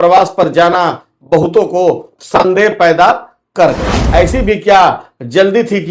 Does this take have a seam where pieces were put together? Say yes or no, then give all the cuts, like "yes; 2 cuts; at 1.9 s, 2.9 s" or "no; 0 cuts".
yes; 1 cut; at 4.0 s